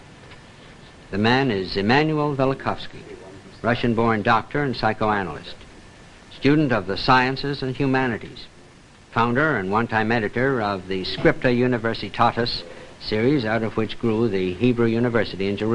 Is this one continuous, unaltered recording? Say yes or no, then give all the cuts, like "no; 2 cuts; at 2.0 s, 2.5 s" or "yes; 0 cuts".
yes; 0 cuts